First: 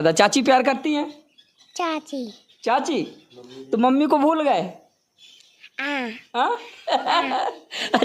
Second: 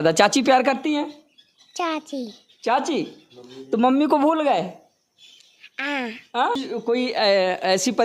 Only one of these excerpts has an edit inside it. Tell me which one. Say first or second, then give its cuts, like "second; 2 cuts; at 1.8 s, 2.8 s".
second; 1 cut; at 6.6 s